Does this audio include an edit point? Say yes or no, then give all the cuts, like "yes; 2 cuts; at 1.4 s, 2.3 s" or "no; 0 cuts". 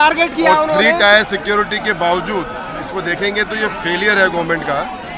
no; 0 cuts